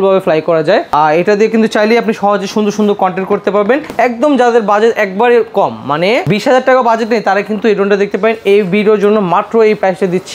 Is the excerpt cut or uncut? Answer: uncut